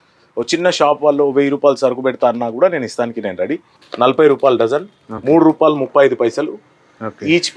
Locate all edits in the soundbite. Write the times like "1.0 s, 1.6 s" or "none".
3.6 s